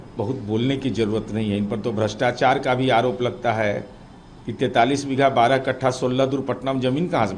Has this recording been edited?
no; 0 cuts

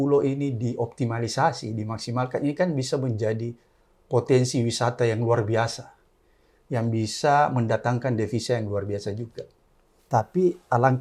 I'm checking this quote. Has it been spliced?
no; 0 cuts

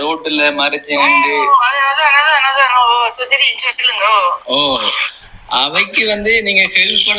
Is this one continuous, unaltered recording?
yes; 0 cuts

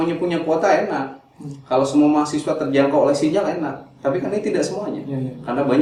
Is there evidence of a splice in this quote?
no; 0 cuts

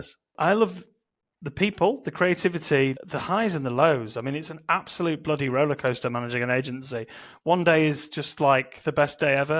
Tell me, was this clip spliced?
no; 0 cuts

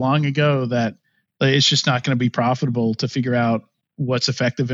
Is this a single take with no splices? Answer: yes; 0 cuts

